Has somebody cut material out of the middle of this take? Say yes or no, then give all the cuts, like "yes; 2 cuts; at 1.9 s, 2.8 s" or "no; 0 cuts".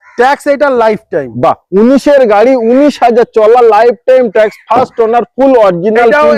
no; 0 cuts